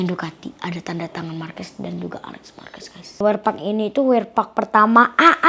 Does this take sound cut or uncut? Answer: cut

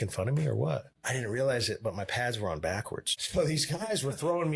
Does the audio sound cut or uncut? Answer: cut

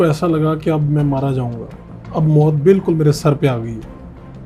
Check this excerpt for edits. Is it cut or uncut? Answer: uncut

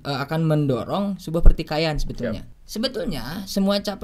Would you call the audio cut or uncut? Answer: cut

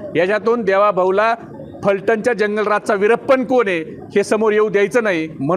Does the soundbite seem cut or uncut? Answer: uncut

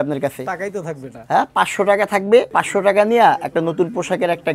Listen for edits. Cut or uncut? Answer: cut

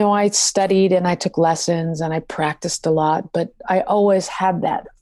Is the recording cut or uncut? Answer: uncut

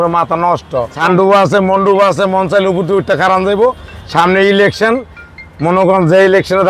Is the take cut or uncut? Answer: cut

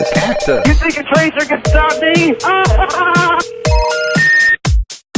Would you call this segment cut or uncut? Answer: cut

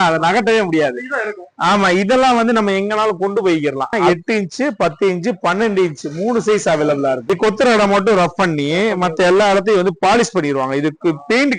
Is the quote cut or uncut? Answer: cut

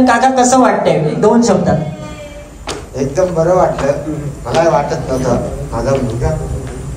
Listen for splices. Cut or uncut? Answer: uncut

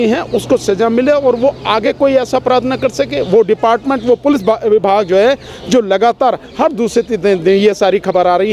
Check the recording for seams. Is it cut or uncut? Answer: uncut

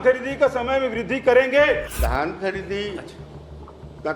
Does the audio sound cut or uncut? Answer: cut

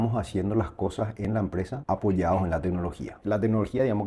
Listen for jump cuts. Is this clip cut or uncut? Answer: cut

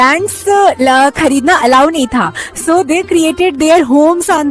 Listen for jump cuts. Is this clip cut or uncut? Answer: uncut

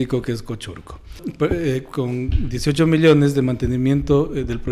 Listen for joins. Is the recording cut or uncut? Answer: cut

